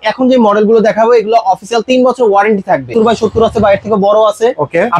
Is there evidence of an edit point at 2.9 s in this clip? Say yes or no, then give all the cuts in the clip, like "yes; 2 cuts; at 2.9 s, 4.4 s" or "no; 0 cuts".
yes; 1 cut; at 2.9 s